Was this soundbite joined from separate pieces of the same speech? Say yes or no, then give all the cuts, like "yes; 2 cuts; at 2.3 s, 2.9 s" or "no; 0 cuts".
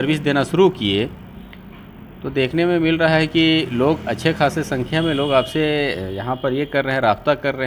no; 0 cuts